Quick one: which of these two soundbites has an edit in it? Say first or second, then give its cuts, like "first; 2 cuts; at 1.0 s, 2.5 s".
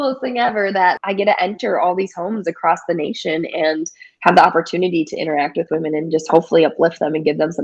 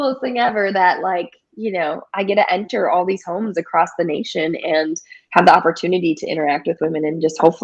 first; 1 cut; at 1.0 s